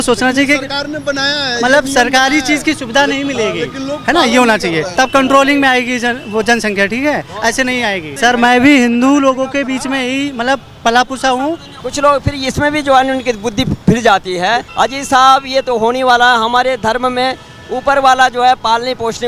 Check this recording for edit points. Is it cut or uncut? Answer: cut